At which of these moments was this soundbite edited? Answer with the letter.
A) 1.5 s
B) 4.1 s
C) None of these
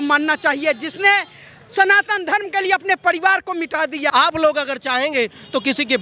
B